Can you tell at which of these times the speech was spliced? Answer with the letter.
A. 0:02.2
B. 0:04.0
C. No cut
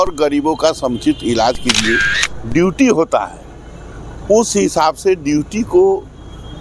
A